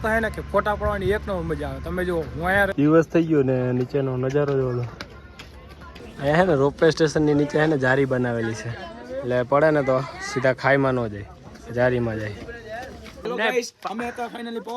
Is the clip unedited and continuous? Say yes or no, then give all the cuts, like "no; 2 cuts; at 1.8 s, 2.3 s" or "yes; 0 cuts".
no; 3 cuts; at 2.7 s, 6.0 s, 13.2 s